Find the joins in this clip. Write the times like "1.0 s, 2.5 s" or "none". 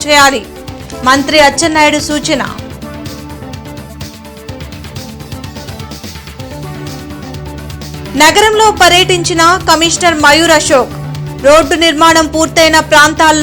none